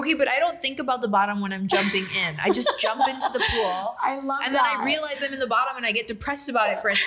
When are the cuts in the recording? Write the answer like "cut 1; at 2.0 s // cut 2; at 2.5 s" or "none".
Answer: none